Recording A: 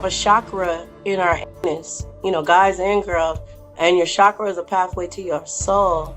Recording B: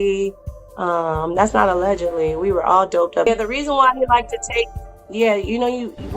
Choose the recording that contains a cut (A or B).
B